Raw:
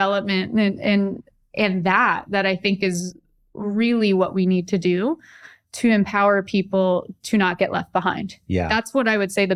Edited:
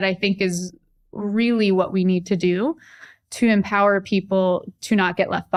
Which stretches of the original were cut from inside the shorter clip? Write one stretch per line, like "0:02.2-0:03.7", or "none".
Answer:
none